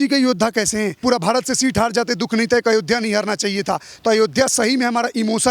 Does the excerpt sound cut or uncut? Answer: cut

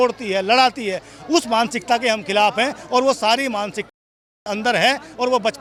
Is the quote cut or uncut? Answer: uncut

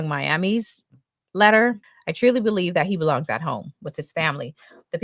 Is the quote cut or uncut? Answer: cut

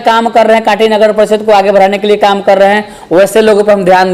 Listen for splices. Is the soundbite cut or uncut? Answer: uncut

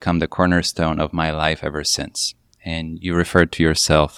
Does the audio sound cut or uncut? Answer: uncut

